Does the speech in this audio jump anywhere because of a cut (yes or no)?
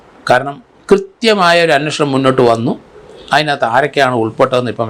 no